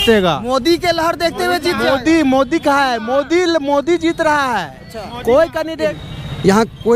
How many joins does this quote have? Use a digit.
1